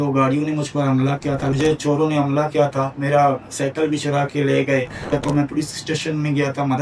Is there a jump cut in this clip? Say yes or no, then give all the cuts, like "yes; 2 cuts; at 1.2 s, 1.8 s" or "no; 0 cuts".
yes; 2 cuts; at 1.5 s, 5.1 s